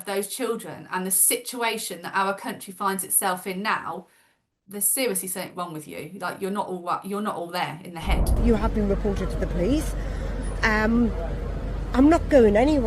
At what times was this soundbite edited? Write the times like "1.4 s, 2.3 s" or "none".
8.3 s